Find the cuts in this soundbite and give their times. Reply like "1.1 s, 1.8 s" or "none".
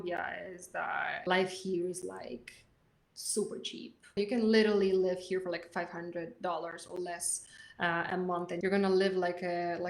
1.2 s, 4.2 s, 8.6 s